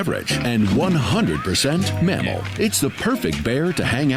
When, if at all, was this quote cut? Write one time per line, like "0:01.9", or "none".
none